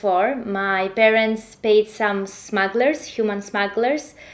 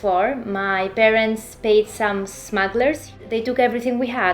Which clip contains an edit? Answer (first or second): second